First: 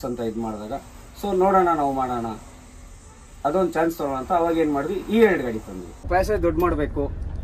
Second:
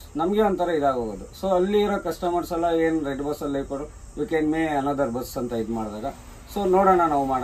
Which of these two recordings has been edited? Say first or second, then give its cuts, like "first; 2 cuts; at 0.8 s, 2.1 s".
first; 1 cut; at 6.1 s